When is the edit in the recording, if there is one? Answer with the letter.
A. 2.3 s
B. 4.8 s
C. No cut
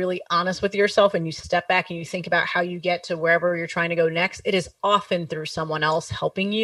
C